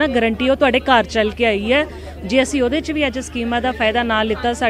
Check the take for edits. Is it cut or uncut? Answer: uncut